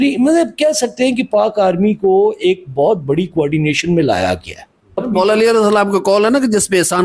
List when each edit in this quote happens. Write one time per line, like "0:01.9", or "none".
0:05.0

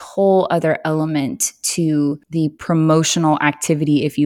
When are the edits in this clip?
0:02.2

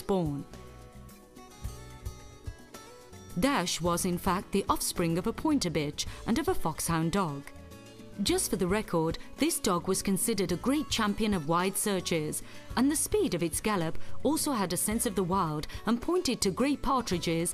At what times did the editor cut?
none

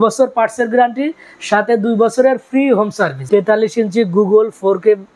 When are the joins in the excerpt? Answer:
0:03.2

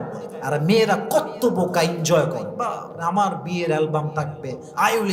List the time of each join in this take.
none

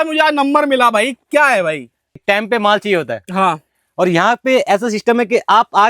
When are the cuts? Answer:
0:02.1

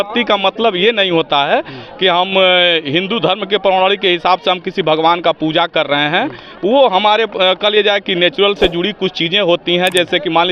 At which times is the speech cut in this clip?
none

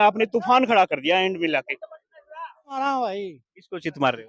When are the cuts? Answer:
0:02.8

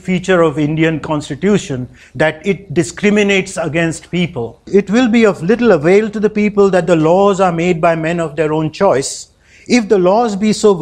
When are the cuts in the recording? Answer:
0:04.6

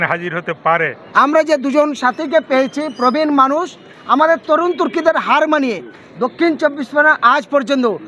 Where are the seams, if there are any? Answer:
0:01.0

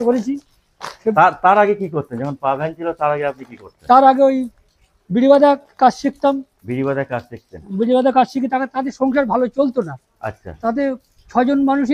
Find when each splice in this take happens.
none

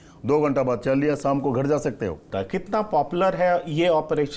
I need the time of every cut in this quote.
0:02.2

